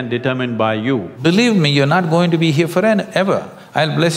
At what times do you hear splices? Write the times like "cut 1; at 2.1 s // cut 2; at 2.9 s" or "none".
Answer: cut 1; at 1.1 s